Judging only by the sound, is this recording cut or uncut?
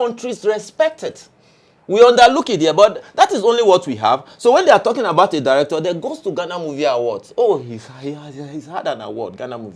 uncut